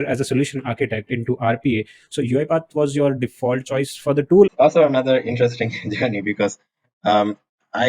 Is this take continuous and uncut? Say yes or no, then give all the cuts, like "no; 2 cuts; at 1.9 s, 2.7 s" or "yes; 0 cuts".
no; 1 cut; at 4.5 s